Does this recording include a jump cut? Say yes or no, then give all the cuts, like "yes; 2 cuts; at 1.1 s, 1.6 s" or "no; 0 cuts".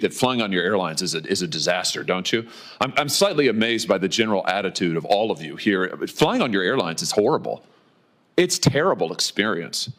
no; 0 cuts